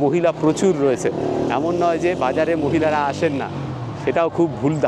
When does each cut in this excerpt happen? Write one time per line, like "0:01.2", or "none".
none